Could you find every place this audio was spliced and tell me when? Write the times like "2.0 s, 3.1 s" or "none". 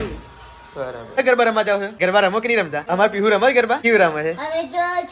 1.2 s, 1.9 s, 2.8 s, 3.8 s